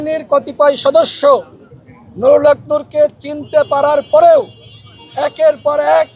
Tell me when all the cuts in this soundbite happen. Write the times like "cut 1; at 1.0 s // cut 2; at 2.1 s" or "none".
none